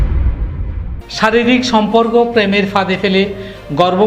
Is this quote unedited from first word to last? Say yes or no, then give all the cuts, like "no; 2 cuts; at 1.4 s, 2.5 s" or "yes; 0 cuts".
no; 1 cut; at 1.0 s